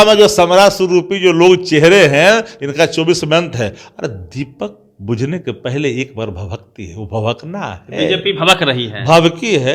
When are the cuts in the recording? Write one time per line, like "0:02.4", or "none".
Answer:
none